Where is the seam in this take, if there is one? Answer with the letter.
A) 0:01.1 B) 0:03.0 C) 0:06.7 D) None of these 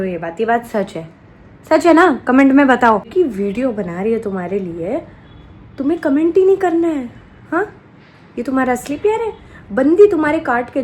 B